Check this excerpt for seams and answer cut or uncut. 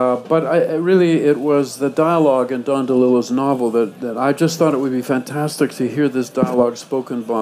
cut